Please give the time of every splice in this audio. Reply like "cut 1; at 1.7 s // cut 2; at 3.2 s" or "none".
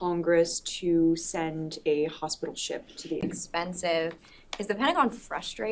none